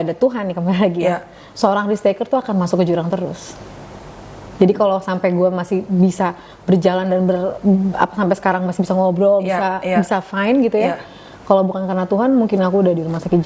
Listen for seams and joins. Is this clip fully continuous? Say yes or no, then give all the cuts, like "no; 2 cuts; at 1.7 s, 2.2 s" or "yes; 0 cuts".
yes; 0 cuts